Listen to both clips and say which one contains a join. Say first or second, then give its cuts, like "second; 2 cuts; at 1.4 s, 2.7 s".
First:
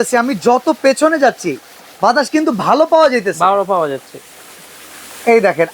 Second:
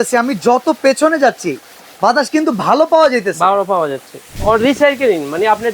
second; 1 cut; at 4.3 s